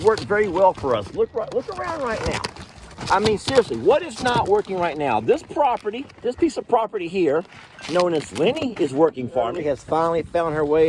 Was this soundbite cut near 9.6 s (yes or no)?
yes